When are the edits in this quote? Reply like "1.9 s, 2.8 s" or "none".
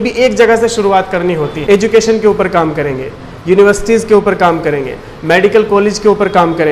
1.5 s